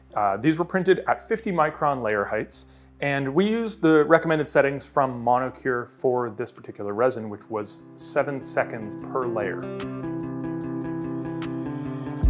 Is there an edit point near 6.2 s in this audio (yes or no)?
no